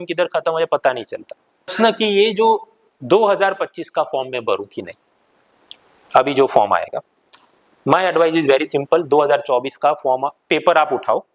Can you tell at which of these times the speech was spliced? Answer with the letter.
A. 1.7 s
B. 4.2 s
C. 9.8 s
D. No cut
A